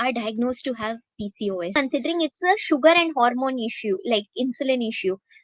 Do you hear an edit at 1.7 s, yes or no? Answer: yes